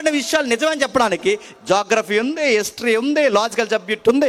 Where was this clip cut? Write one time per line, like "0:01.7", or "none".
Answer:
none